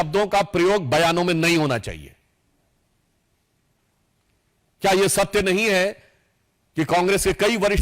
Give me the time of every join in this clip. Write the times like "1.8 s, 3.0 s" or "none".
none